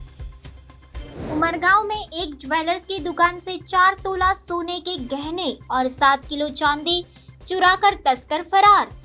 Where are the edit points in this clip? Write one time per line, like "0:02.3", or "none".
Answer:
0:01.1